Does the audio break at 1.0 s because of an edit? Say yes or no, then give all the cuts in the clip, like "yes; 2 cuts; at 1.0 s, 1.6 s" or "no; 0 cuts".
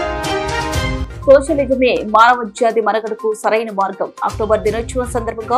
yes; 1 cut; at 1.0 s